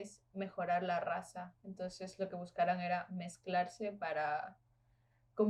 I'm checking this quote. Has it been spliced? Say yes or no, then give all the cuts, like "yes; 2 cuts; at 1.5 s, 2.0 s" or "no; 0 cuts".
no; 0 cuts